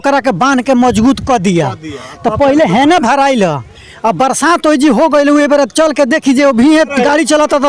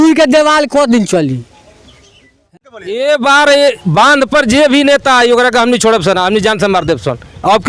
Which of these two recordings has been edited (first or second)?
second